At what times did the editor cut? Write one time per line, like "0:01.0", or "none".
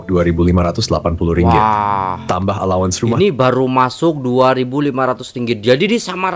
none